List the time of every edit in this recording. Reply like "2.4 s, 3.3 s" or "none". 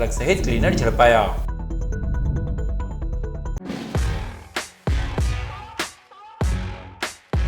3.5 s